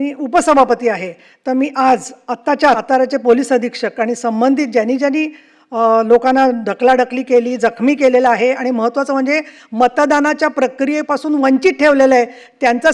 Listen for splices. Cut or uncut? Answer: cut